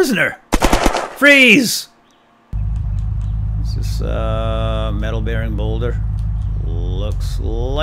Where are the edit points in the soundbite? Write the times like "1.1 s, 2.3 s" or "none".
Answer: 2.5 s